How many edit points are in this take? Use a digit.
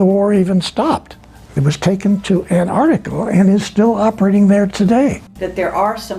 1